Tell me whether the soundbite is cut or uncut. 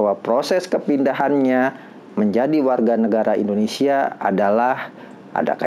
uncut